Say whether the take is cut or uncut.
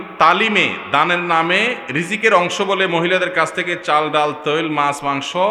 uncut